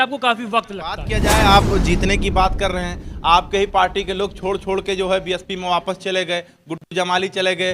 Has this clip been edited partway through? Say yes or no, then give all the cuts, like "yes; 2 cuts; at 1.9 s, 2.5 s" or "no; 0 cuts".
yes; 1 cut; at 1.1 s